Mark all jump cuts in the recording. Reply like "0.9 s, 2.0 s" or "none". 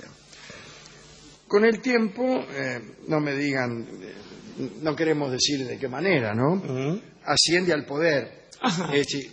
1.8 s